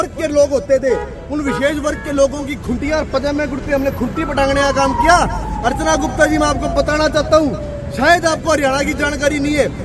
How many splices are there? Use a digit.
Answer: 0